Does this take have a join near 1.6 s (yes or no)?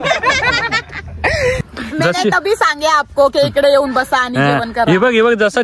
yes